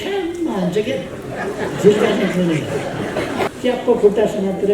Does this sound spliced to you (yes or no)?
yes